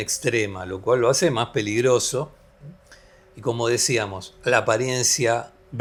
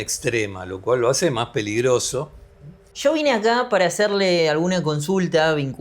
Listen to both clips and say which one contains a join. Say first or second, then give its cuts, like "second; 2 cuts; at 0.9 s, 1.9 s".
second; 1 cut; at 2.9 s